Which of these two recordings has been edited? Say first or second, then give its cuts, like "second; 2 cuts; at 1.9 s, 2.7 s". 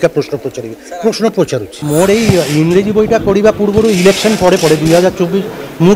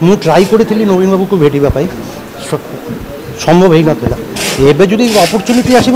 first; 1 cut; at 1.7 s